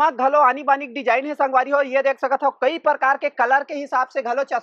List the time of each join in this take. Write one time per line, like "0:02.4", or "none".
none